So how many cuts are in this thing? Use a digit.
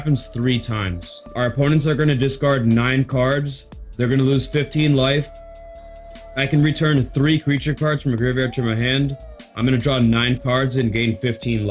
1